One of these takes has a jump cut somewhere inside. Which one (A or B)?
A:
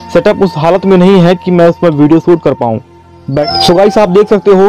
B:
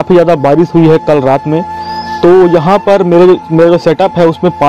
A